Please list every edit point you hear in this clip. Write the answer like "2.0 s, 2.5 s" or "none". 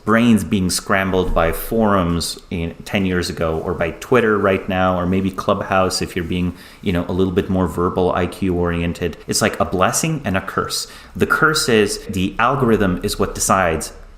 9.2 s, 12.1 s